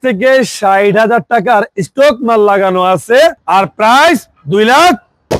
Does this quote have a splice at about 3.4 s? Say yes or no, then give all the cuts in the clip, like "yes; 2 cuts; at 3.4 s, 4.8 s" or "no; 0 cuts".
yes; 1 cut; at 3.4 s